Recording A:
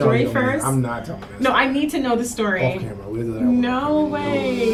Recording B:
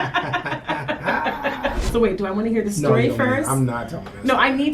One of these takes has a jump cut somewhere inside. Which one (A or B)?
B